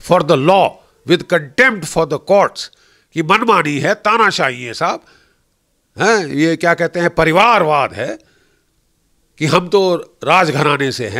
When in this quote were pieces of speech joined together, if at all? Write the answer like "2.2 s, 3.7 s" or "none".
none